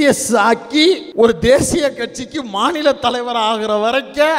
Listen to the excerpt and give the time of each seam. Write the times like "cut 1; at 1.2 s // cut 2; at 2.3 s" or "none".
cut 1; at 1.1 s